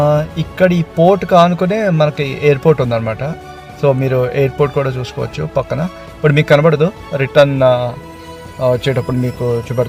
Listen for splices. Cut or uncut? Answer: uncut